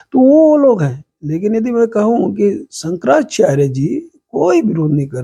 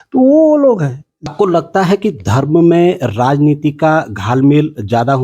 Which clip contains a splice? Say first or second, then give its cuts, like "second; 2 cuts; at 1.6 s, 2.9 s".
second; 1 cut; at 1.3 s